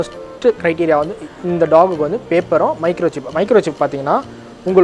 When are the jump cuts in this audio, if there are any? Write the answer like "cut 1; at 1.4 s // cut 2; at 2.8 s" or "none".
none